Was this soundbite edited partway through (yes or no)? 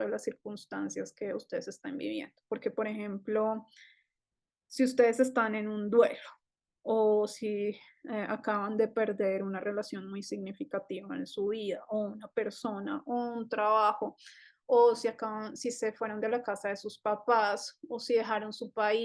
no